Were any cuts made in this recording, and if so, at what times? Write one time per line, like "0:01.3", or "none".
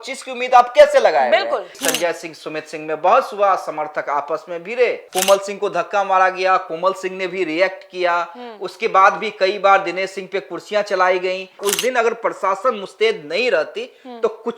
0:01.8
0:05.0
0:11.6